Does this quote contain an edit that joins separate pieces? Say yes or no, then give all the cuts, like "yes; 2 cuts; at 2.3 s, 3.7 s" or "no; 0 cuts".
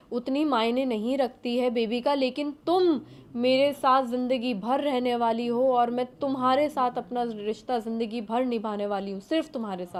no; 0 cuts